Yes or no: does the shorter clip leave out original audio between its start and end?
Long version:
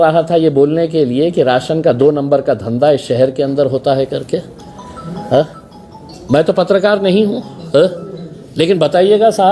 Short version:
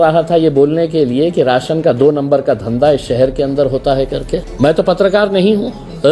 yes